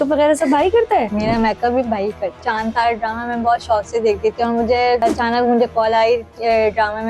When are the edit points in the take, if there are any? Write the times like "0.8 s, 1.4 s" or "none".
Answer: 1.1 s, 2.4 s, 5.0 s